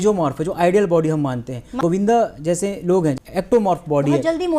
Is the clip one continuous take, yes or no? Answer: no